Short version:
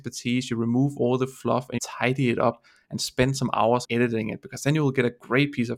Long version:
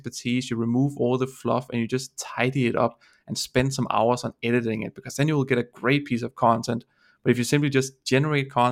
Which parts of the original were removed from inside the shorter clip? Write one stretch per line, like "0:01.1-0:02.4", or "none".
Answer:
0:01.7-0:02.1
0:04.2-0:04.4